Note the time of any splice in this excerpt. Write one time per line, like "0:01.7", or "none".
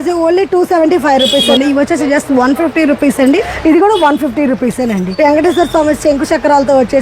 0:01.5
0:03.5
0:05.1